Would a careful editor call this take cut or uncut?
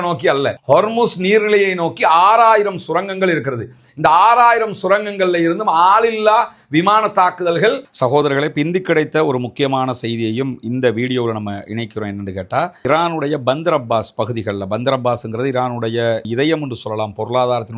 cut